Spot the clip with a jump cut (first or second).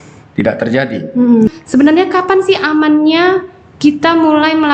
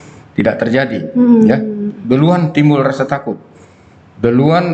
first